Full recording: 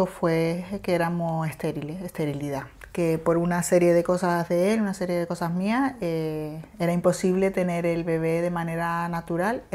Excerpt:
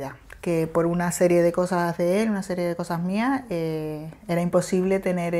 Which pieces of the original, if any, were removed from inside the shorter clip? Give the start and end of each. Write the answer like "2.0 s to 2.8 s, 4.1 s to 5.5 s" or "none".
none